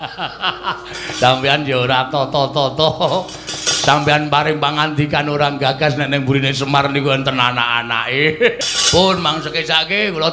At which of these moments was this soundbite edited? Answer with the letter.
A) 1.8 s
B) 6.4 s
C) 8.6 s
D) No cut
C